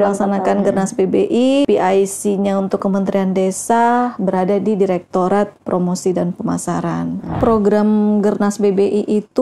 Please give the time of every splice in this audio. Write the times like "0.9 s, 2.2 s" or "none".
1.7 s, 7.4 s